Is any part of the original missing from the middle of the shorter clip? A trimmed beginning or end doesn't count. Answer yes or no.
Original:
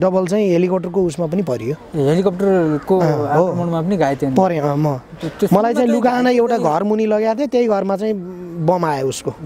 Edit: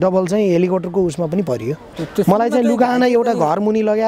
yes